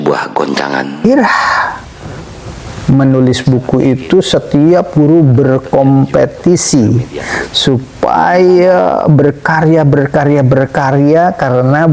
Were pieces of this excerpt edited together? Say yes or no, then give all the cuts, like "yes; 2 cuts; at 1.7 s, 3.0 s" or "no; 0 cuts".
yes; 1 cut; at 1.1 s